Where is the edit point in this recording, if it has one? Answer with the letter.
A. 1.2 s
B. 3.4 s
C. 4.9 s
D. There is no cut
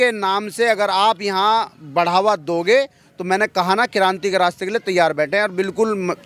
D